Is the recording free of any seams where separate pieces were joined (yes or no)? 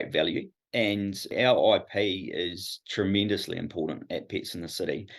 no